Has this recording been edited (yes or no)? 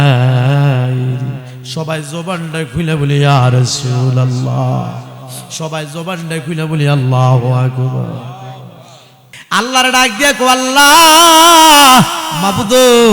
yes